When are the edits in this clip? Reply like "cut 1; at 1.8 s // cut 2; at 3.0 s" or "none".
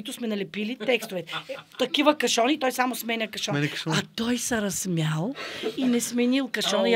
none

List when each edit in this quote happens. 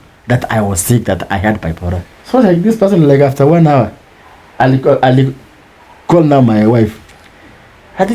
cut 1; at 2.0 s

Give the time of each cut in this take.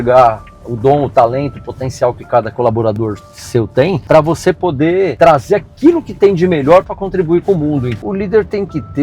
cut 1; at 4.0 s // cut 2; at 5.1 s // cut 3; at 8.0 s

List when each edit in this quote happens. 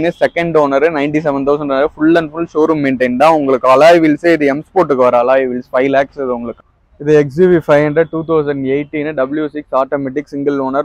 cut 1; at 6.5 s

